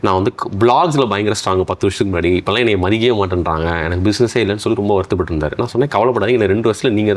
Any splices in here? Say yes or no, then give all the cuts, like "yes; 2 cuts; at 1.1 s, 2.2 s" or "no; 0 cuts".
no; 0 cuts